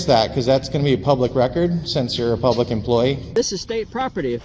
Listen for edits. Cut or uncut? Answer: cut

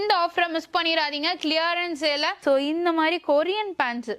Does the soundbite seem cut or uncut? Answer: cut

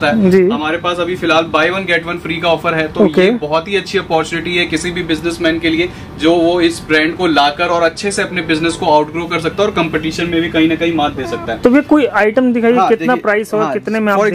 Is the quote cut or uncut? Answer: uncut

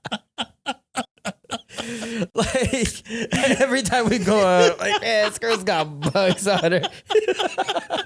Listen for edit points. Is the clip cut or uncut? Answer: uncut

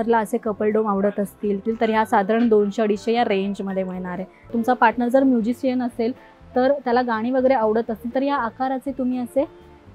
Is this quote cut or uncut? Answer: cut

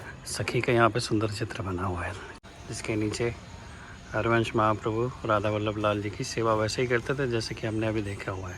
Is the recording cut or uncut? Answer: cut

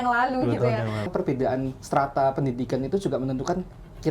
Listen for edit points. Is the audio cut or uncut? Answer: cut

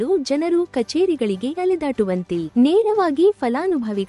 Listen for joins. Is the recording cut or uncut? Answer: cut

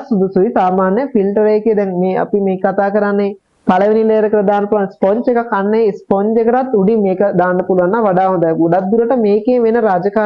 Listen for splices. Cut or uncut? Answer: uncut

